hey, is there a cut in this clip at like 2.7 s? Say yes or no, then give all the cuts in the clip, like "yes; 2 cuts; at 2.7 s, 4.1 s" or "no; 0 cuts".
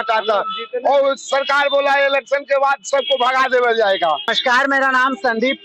no; 1 cut; at 4.3 s